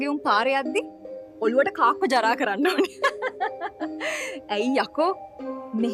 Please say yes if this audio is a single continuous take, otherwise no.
yes